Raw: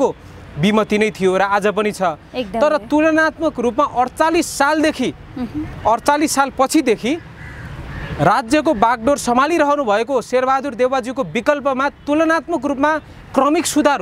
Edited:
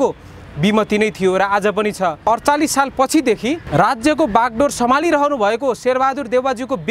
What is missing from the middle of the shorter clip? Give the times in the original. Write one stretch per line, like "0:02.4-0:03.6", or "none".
0:02.2-0:05.8
0:07.2-0:08.1